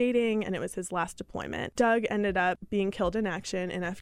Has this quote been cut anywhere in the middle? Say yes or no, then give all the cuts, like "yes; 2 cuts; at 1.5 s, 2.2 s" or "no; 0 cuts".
yes; 2 cuts; at 1.6 s, 2.6 s